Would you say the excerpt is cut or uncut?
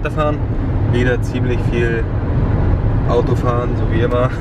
uncut